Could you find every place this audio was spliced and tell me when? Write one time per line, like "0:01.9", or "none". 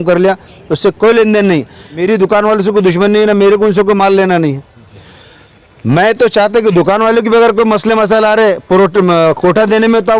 0:02.0